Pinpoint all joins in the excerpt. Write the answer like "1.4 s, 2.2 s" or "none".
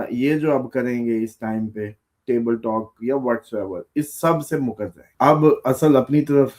5.0 s

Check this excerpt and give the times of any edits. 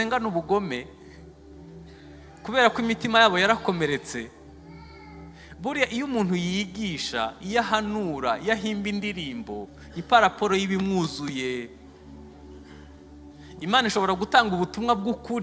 1.1 s, 2.4 s

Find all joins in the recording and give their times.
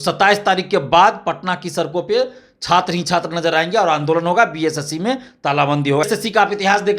6.1 s

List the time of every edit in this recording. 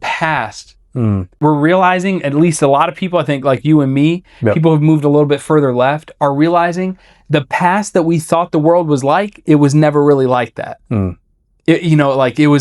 1.4 s

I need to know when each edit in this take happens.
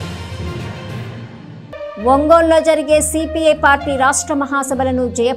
1.9 s

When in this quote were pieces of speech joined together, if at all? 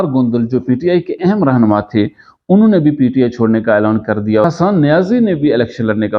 4.5 s

